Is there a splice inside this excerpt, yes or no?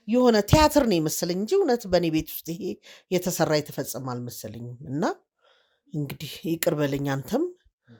no